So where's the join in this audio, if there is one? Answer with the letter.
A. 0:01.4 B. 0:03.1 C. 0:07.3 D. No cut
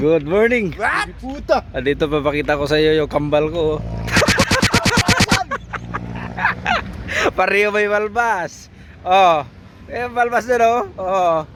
D